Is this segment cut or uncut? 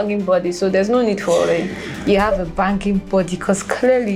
uncut